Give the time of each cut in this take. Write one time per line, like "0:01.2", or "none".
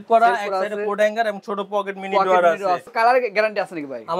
0:02.9